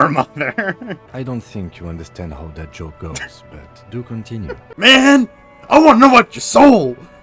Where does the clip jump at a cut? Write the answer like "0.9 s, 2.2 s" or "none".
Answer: 1.0 s, 4.7 s